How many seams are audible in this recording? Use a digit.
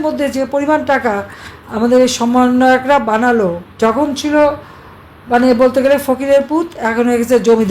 1